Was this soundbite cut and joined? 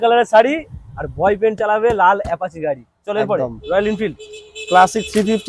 no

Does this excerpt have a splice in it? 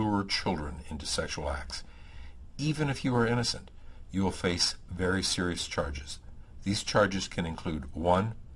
yes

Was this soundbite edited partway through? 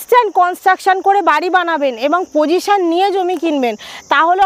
no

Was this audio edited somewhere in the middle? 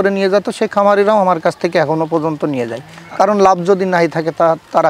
no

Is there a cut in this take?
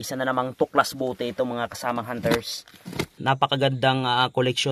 yes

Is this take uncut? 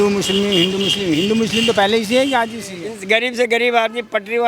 no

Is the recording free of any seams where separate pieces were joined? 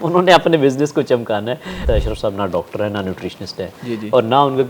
no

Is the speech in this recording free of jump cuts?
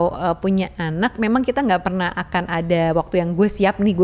yes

